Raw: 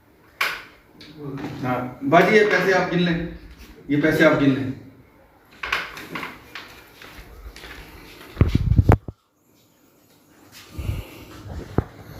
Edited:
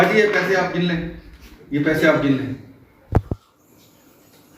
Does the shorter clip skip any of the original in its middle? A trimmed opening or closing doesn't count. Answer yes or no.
yes